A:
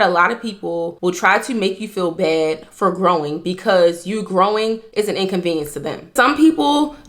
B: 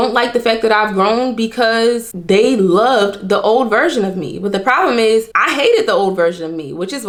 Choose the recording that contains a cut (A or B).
A